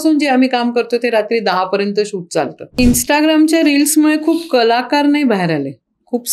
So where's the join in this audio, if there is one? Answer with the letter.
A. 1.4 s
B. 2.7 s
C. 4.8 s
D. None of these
B